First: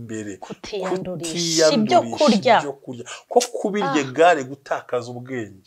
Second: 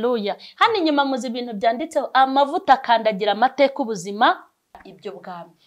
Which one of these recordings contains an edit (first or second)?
second